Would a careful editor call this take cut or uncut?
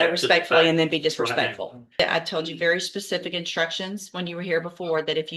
cut